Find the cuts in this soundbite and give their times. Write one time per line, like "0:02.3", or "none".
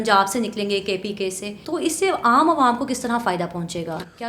0:01.5

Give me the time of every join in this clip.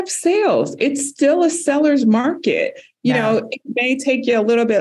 none

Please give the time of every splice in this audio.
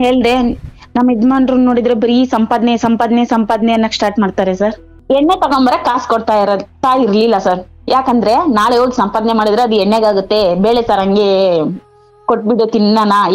0:04.9

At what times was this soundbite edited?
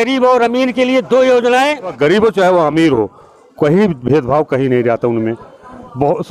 0:01.9

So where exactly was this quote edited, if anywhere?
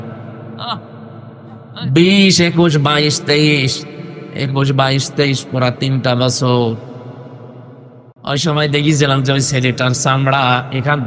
0:08.0

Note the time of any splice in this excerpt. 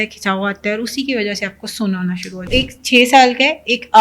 0:02.5

